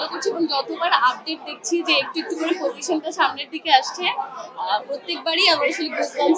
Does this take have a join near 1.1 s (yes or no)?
no